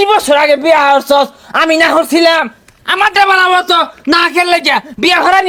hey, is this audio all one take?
yes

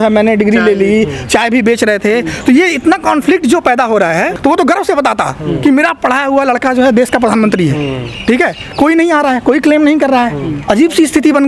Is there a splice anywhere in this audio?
yes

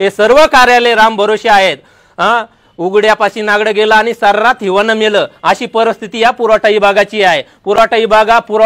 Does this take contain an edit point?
no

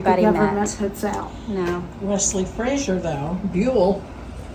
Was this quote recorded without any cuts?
yes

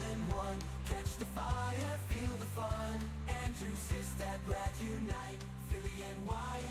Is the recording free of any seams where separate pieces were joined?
yes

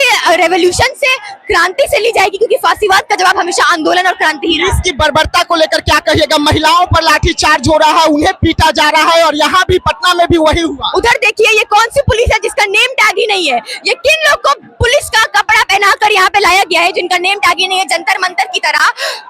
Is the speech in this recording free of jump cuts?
yes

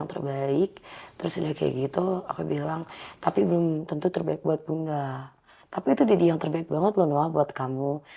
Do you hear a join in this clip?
no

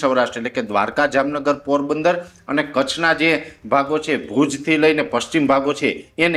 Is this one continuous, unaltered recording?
yes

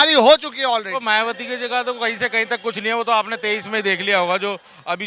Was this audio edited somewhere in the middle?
yes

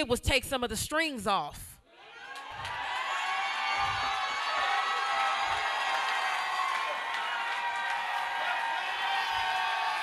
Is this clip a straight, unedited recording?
yes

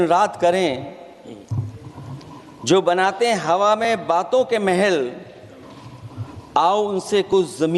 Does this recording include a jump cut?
no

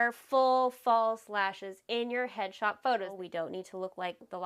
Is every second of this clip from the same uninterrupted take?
no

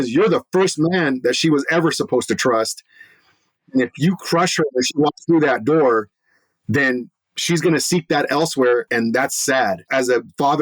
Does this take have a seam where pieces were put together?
yes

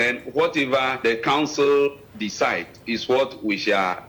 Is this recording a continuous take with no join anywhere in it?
no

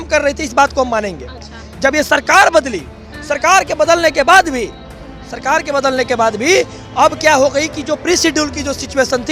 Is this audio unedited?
yes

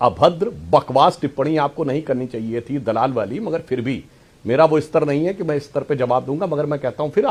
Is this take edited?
no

